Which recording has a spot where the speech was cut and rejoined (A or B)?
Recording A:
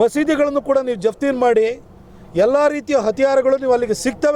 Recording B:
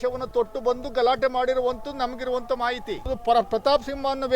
B